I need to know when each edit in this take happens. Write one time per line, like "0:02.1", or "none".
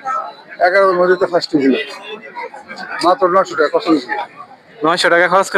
none